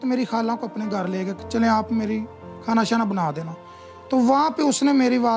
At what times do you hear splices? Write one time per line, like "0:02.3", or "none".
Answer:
none